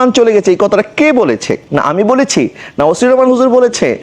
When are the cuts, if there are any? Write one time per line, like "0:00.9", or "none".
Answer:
0:01.6